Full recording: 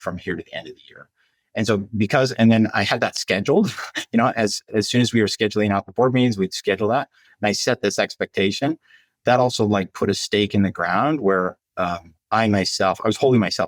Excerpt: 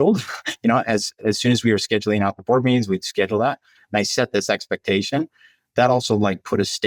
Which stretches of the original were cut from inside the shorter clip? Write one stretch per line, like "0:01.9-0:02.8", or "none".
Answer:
none